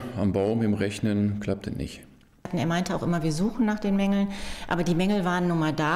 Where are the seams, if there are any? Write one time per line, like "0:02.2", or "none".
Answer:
0:02.5

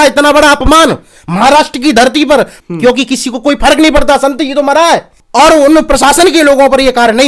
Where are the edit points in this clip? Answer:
0:02.6
0:05.2

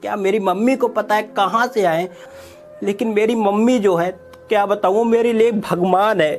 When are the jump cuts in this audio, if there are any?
0:02.3

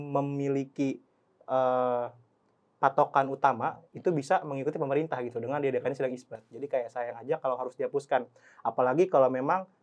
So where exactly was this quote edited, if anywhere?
none

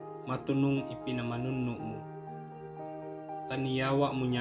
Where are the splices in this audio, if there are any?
0:01.8
0:03.5

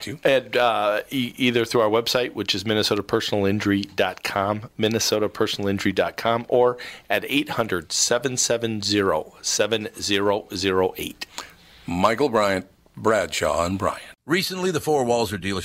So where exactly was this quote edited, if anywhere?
0:14.1

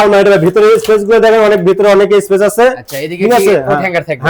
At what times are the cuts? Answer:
none

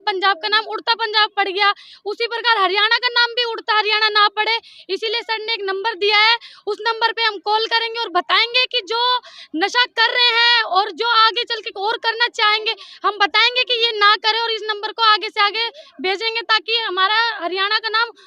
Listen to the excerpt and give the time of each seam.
none

